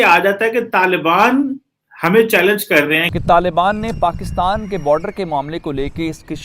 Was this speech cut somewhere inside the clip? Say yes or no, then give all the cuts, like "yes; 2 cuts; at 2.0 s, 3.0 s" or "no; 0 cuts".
yes; 1 cut; at 3.1 s